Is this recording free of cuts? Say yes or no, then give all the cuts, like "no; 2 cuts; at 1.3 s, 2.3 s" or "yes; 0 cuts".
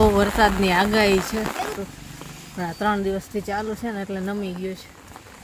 no; 1 cut; at 1.8 s